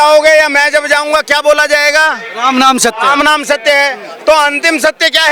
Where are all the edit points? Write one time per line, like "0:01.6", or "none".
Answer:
none